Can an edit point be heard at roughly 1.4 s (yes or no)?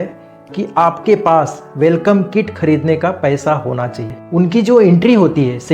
no